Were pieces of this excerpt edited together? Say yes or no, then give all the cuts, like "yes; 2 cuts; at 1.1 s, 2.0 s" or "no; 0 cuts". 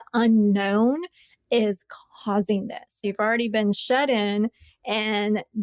yes; 1 cut; at 3.0 s